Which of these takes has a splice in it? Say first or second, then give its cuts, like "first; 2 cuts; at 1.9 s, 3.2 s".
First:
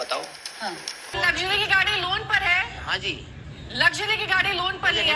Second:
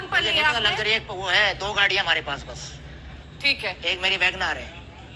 first; 1 cut; at 1.2 s